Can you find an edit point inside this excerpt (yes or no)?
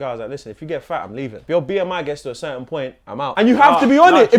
yes